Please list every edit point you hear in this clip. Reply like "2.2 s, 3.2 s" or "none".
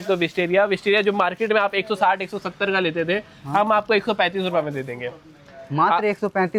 none